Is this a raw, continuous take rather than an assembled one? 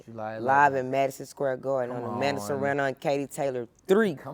yes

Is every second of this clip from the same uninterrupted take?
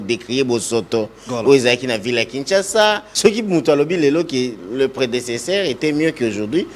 no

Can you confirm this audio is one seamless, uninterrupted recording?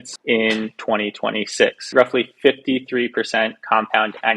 no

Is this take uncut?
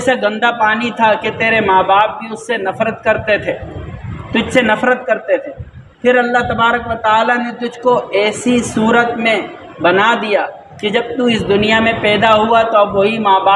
yes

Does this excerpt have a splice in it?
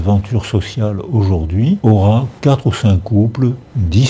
yes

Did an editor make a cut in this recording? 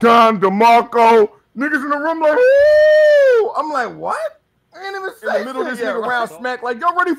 yes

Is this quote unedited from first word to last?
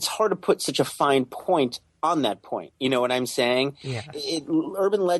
yes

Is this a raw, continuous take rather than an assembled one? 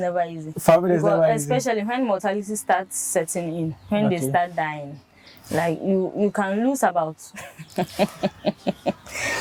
yes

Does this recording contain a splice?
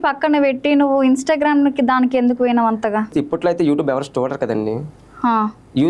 yes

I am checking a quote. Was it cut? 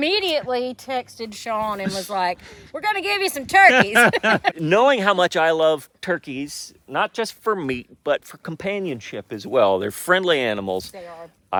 no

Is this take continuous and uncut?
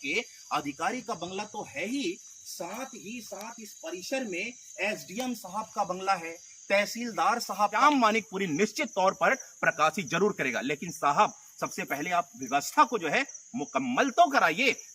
no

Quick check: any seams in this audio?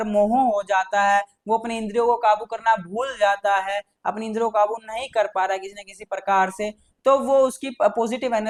no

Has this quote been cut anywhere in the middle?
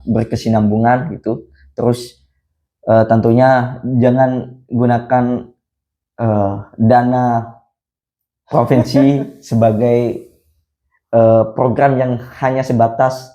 no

